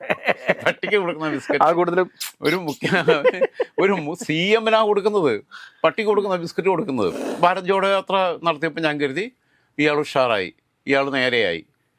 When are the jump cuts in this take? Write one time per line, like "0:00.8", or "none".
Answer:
0:07.2